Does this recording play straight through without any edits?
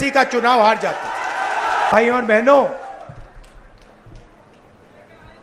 no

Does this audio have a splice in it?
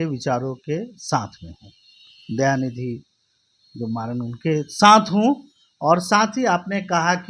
no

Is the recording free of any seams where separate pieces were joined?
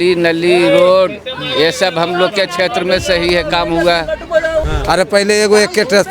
no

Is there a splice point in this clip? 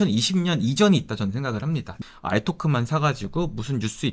yes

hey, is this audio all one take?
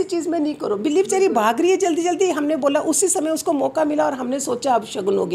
yes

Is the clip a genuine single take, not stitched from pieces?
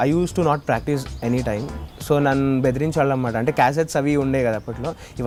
yes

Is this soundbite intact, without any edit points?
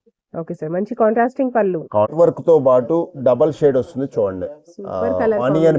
no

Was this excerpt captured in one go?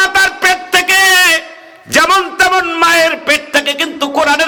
yes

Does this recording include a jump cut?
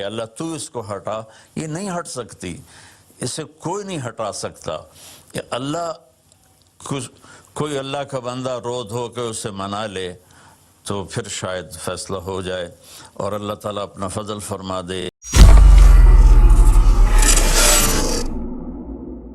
yes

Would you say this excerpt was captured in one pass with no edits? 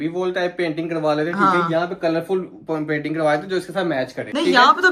yes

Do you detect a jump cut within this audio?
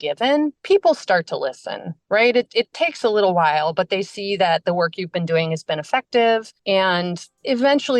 yes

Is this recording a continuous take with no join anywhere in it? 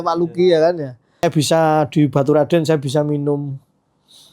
no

